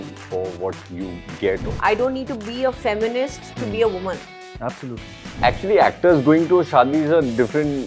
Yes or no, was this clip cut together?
yes